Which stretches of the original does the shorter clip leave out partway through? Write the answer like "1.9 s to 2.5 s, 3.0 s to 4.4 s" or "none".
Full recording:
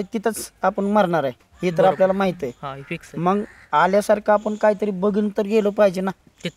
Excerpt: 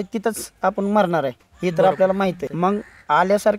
2.5 s to 3.1 s